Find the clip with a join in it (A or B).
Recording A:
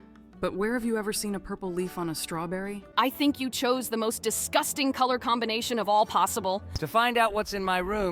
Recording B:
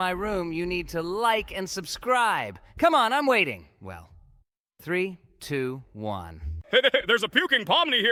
A